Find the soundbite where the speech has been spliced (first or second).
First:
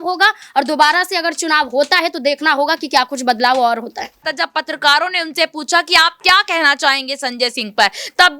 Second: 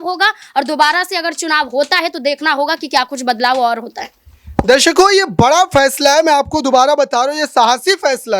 first